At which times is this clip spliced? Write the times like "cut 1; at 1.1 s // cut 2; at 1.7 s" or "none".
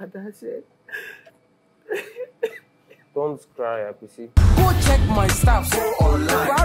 cut 1; at 4.4 s